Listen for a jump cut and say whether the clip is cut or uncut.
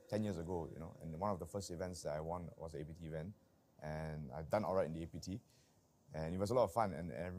uncut